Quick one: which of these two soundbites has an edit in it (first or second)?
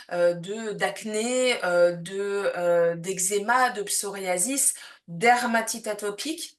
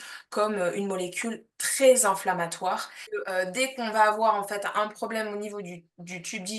second